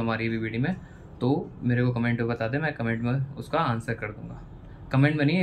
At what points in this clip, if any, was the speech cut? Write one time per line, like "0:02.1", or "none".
none